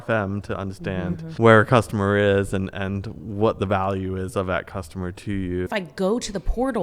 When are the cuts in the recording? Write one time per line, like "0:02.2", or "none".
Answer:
0:01.3
0:05.7